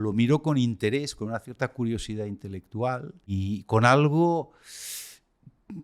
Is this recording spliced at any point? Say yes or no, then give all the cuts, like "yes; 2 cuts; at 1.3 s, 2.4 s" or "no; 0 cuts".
yes; 1 cut; at 3.3 s